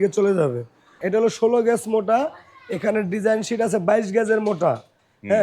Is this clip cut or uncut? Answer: cut